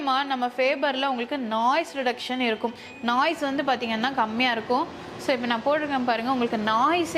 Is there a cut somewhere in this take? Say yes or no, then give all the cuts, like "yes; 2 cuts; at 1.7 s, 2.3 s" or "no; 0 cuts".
no; 0 cuts